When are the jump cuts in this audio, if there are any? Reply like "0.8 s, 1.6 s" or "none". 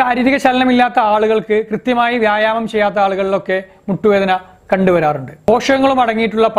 5.3 s

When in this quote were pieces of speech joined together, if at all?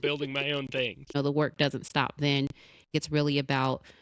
1.1 s, 2.9 s

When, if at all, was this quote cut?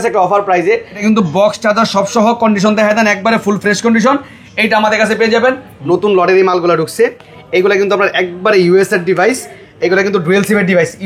0.9 s, 5.7 s

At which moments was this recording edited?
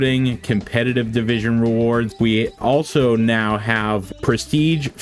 2.1 s, 4.1 s

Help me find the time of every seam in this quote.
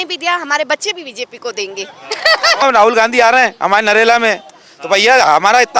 2.6 s

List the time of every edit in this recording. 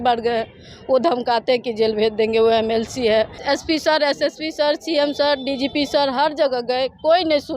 3.4 s

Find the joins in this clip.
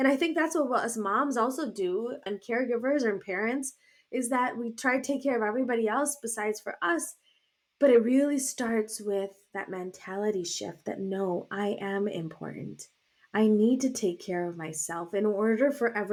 none

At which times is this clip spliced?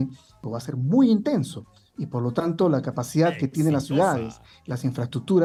none

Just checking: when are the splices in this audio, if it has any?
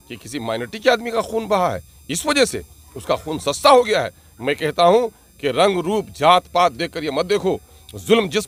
none

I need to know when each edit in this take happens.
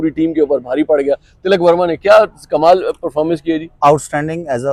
none

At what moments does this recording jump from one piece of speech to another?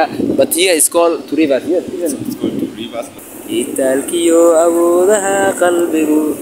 3.2 s

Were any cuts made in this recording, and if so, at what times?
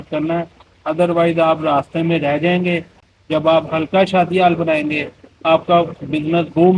none

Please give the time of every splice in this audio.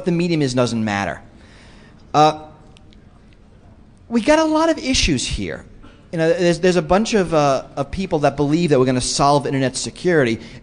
5.7 s

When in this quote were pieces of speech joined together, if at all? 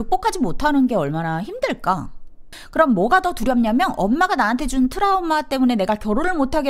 2.5 s

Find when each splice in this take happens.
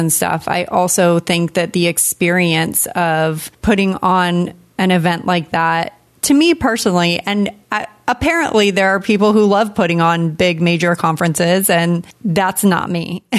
12.1 s

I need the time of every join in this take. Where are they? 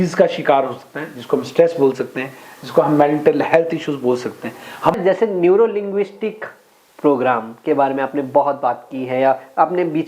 4.9 s

